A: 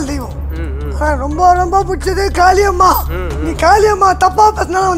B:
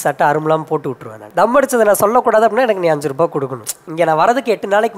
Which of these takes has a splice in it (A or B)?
B